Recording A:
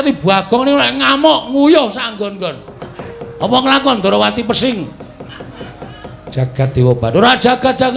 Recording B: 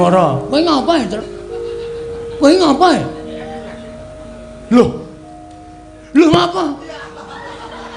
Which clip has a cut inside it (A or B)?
A